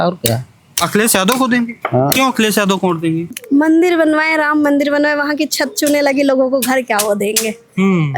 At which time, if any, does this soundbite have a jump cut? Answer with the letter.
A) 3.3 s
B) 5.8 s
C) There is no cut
A